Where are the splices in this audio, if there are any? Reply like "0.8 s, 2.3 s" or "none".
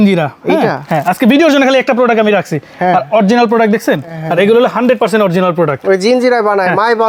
4.2 s

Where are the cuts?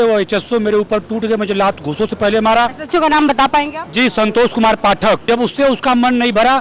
5.2 s

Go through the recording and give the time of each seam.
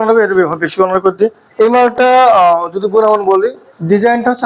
1.4 s, 3.6 s

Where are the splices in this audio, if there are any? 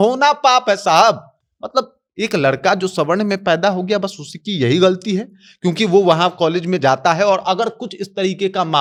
none

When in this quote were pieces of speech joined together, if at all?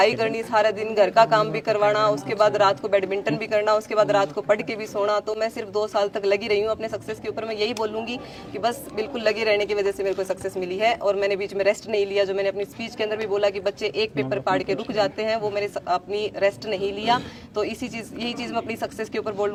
none

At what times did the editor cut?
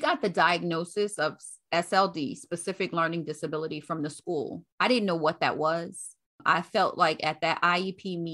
4.6 s

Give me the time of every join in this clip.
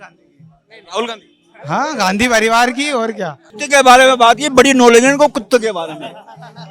3.5 s

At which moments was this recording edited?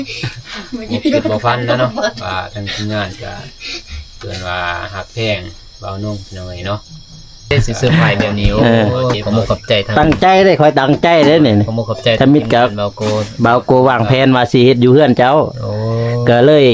7.5 s

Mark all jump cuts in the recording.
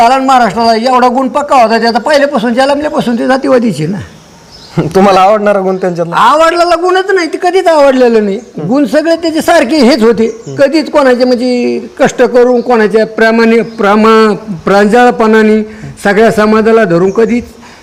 none

